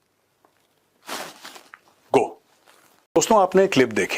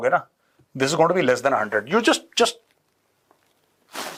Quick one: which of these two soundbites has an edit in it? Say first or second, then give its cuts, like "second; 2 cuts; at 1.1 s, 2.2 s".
first; 1 cut; at 3.2 s